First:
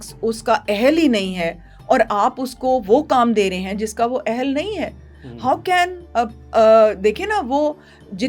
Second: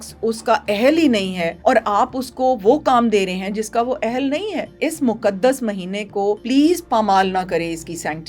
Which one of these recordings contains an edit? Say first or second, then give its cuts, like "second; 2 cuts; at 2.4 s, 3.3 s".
second; 3 cuts; at 1.5 s, 4.7 s, 6.4 s